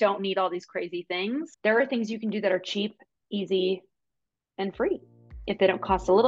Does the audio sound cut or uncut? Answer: cut